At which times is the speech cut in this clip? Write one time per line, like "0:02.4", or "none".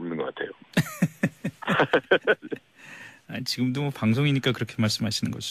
0:01.0